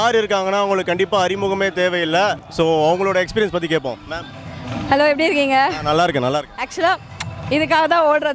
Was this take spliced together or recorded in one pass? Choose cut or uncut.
cut